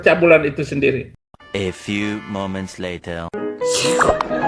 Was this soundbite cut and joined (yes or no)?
yes